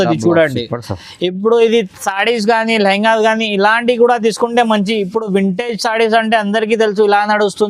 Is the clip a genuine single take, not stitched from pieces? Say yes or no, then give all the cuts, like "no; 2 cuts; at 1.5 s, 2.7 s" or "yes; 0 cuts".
yes; 0 cuts